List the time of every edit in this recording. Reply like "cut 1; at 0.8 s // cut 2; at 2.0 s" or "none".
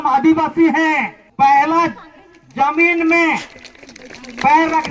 cut 1; at 1.2 s

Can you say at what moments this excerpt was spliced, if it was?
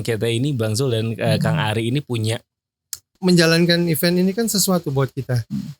cut 1; at 3.1 s

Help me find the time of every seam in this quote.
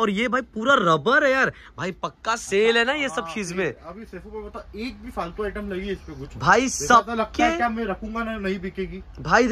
none

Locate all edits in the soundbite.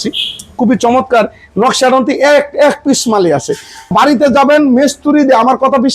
cut 1; at 3.9 s

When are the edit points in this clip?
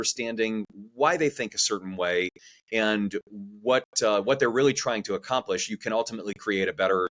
none

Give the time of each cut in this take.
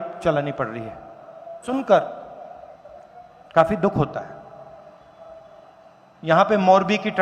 cut 1; at 1.6 s

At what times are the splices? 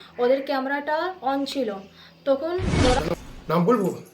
cut 1; at 3.0 s

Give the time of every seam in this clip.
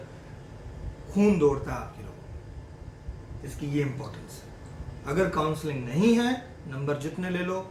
none

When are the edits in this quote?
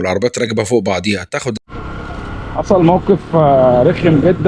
cut 1; at 1.5 s

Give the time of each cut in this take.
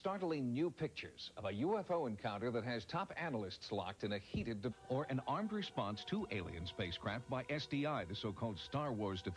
none

